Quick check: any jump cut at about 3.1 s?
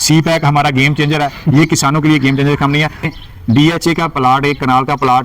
yes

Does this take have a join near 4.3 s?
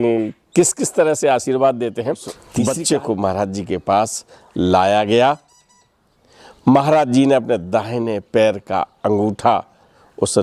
no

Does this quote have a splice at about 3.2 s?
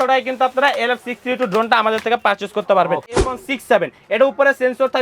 yes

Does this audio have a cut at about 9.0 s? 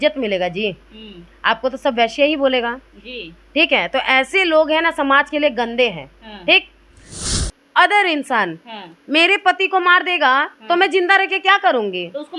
no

